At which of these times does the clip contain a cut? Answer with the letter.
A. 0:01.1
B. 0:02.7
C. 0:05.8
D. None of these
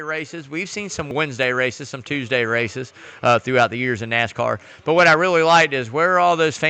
A